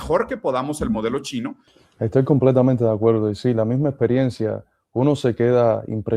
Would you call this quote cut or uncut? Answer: cut